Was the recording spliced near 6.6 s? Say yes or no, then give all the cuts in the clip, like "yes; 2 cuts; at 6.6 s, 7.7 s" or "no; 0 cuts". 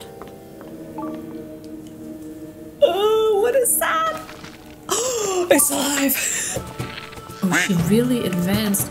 yes; 1 cut; at 6.6 s